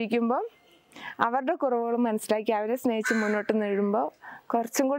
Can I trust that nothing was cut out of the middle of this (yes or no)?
yes